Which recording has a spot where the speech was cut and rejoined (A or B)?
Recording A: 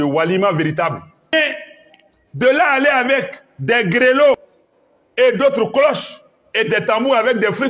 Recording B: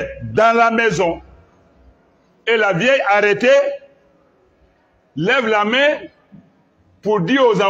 A